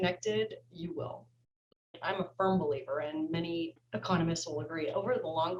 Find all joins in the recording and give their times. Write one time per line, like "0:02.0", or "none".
0:02.0
0:03.8